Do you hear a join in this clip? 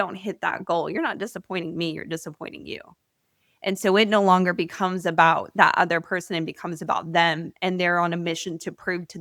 no; 0 cuts

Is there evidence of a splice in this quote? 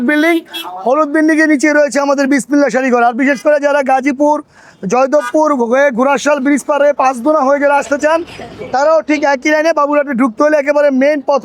no; 0 cuts

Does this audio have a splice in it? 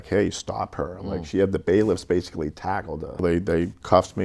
yes; 1 cut; at 3.2 s

